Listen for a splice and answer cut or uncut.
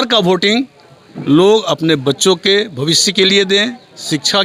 uncut